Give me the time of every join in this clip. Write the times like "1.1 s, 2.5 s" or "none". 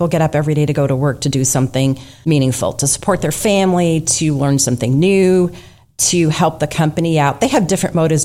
2.1 s